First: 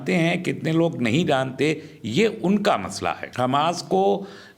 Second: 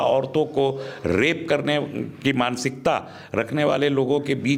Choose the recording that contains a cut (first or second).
first